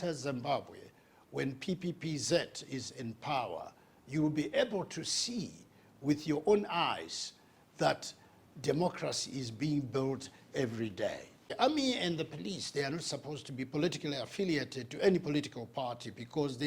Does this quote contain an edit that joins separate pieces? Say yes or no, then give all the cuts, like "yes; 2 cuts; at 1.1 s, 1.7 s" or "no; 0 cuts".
yes; 1 cut; at 11.5 s